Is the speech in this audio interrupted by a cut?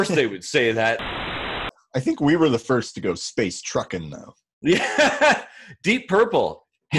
yes; 1 cut; at 1.6 s

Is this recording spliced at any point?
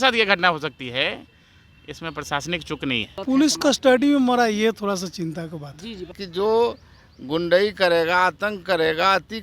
yes; 2 cuts; at 3.1 s, 6.2 s

